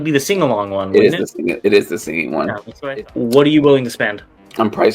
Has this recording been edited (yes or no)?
yes